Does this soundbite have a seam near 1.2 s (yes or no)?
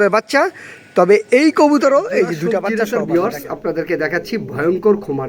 no